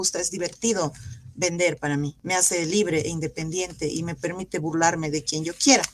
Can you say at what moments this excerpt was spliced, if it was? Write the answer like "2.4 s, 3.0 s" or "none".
2.2 s